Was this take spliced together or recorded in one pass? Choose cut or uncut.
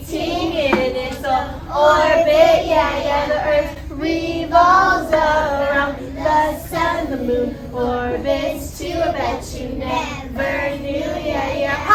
uncut